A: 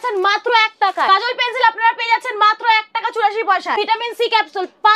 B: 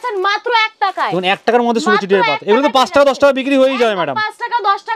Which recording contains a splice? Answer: A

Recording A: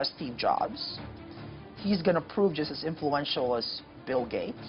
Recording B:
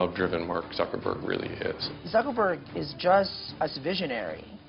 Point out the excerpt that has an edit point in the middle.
B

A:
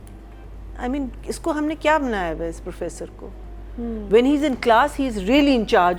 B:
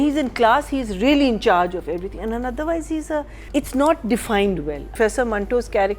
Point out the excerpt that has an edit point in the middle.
B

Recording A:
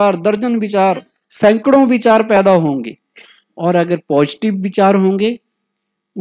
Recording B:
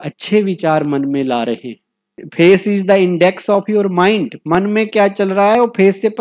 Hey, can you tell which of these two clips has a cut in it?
B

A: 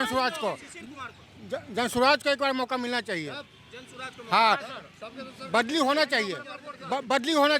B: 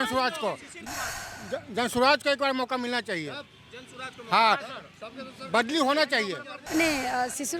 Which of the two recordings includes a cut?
B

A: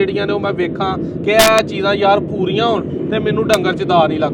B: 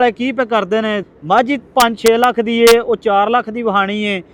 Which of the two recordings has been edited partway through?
B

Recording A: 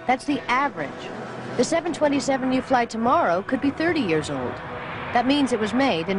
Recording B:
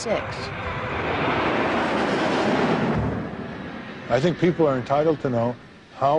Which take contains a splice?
B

